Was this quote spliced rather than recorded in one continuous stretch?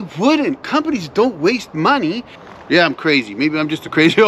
yes; 1 cut; at 2.3 s

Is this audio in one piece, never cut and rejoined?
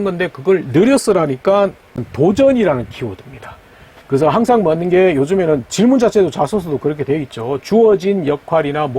no; 1 cut; at 1.9 s

